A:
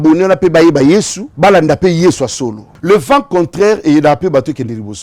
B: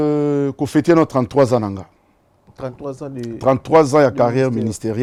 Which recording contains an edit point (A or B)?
A